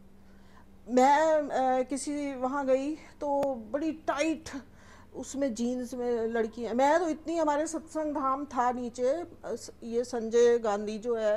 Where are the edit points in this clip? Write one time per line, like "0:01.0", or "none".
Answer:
none